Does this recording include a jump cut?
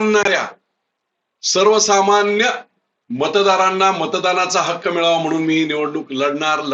no; 0 cuts

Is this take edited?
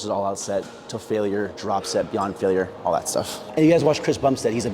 yes; 1 cut; at 3.5 s

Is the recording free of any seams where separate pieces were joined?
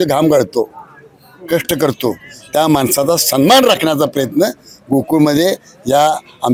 yes; 0 cuts

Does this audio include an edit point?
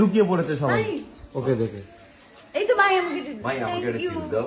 no; 0 cuts

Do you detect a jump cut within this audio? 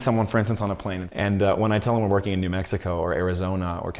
yes; 1 cut; at 1.0 s

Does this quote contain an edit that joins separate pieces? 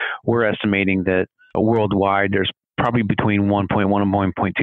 yes; 1 cut; at 1.4 s

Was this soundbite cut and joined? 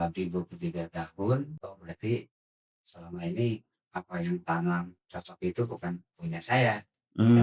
yes; 1 cut; at 1.6 s

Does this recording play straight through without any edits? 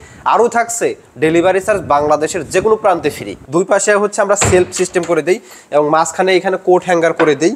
no; 1 cut; at 3.3 s

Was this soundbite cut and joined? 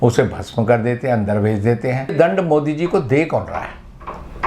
yes; 1 cut; at 2.1 s

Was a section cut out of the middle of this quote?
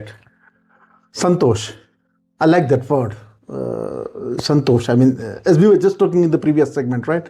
no; 0 cuts

